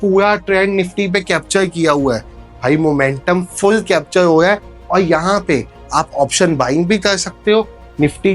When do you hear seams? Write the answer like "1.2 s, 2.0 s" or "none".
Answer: none

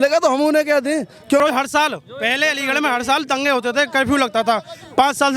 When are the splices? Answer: 1.4 s

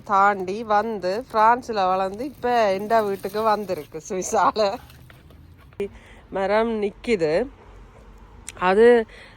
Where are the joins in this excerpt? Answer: 5.8 s

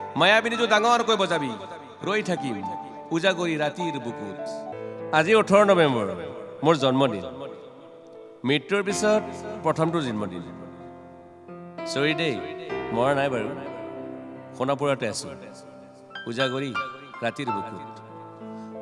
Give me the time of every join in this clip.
4.7 s

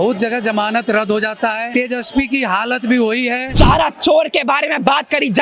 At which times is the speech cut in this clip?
1.7 s, 3.4 s

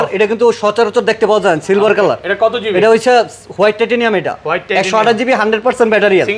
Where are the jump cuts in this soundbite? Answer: none

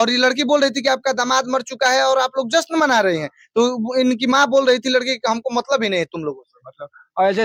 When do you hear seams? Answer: none

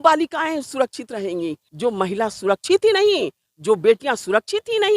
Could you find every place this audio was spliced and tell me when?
1.6 s

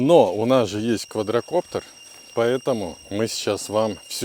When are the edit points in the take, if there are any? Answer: none

